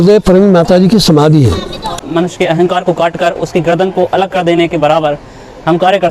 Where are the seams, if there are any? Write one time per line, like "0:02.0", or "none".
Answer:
0:01.9